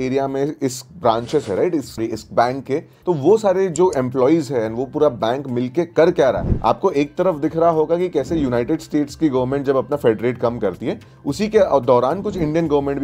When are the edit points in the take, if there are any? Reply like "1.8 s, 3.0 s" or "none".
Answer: 2.9 s, 6.5 s